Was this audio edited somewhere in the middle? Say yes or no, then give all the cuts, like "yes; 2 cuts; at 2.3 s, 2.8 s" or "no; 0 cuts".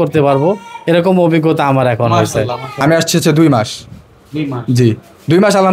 yes; 1 cut; at 2.7 s